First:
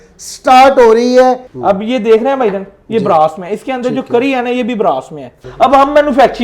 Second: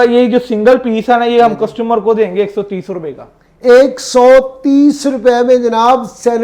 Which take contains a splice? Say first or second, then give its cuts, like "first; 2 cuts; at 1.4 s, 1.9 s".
first; 2 cuts; at 1.5 s, 5.4 s